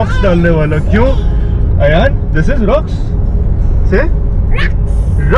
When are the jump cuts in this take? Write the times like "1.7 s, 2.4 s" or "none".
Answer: none

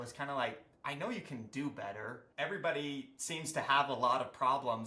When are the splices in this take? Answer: 2.2 s

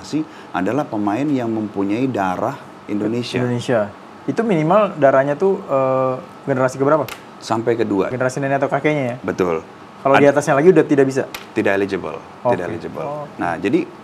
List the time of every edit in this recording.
8.1 s

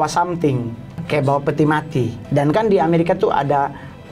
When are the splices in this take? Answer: 0.9 s, 2.2 s

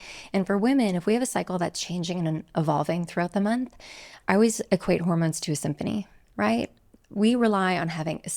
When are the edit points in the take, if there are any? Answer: none

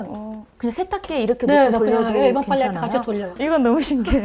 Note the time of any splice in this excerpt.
3.3 s

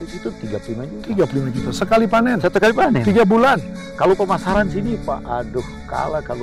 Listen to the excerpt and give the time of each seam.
3.7 s

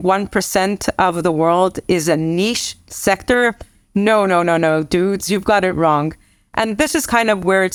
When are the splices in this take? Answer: none

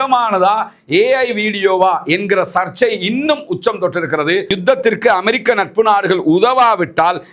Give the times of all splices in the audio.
4.5 s

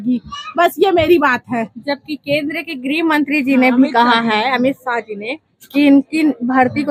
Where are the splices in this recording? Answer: none

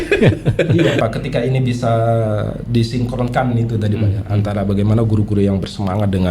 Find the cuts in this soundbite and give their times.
1.0 s

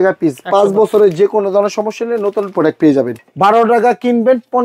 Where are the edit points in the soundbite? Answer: 3.1 s

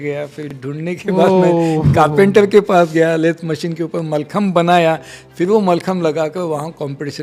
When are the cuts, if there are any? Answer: none

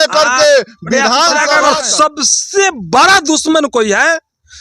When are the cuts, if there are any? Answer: 1.5 s

